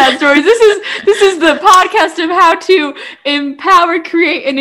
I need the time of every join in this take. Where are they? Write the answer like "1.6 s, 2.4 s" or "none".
none